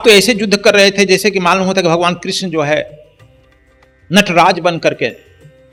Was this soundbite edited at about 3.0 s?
no; 0 cuts

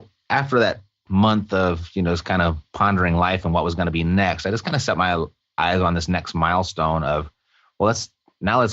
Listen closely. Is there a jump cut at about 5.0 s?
no; 1 cut; at 0.9 s

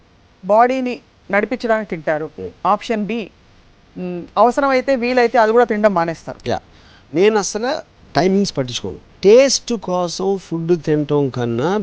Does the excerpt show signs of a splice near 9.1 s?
yes; 1 cut; at 9.1 s

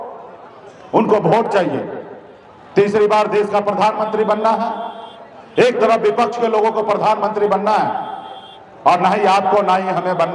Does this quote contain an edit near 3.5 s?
no; 0 cuts

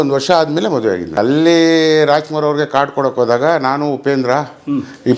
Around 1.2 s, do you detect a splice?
yes; 1 cut; at 1.2 s

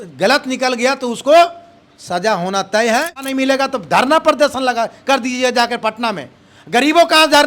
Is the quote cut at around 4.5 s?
no; 1 cut; at 3.3 s

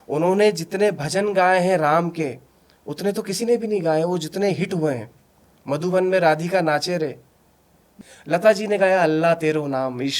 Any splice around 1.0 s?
no; 1 cut; at 7.9 s

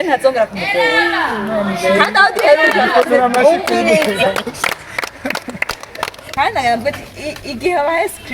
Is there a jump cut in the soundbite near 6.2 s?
yes; 1 cut; at 6.2 s

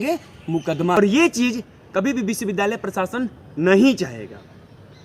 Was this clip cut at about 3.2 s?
no; 1 cut; at 1.0 s

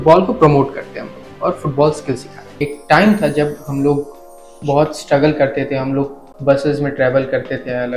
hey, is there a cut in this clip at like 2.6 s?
yes; 2 cuts; at 2.6 s, 6.2 s

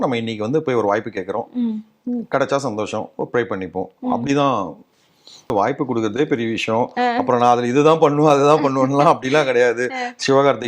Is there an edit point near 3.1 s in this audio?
no; 1 cut; at 5.5 s

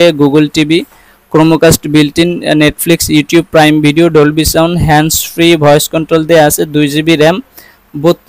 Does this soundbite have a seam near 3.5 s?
no; 0 cuts

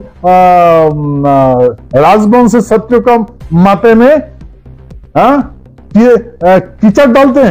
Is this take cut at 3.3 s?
no; 0 cuts

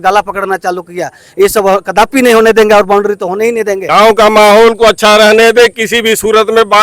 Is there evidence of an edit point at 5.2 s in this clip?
no; 1 cut; at 3.8 s

